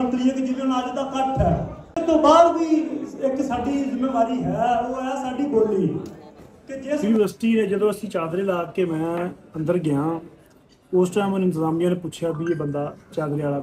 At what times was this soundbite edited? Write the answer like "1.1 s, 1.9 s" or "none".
2.0 s, 7.0 s